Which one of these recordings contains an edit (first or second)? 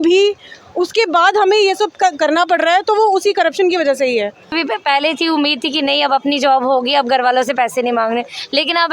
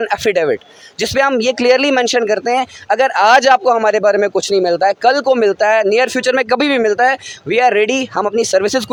first